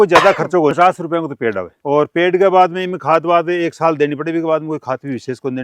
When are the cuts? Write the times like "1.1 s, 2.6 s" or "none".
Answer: 0.7 s, 1.8 s